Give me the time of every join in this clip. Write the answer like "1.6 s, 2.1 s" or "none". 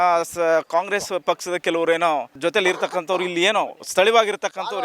2.4 s